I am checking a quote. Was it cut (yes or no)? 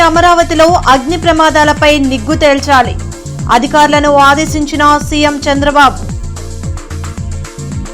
no